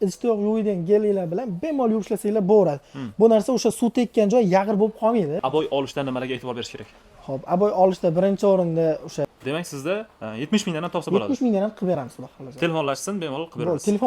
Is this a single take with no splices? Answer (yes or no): no